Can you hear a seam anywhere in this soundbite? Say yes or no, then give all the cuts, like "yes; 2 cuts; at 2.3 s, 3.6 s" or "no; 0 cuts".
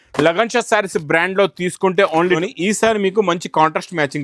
yes; 1 cut; at 2.4 s